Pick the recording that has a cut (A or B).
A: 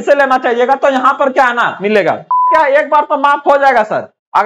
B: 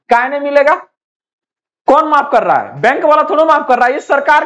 A